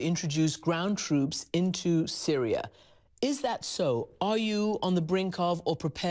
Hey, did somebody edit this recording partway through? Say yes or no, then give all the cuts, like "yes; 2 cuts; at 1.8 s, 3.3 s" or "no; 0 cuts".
yes; 1 cut; at 1.4 s